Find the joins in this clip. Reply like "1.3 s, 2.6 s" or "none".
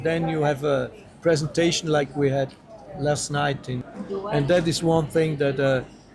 3.9 s